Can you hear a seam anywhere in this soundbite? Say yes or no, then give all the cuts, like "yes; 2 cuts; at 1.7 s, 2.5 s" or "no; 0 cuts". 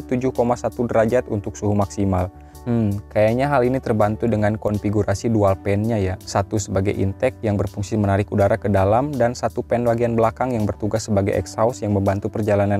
no; 0 cuts